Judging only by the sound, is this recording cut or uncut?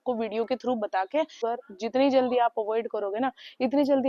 cut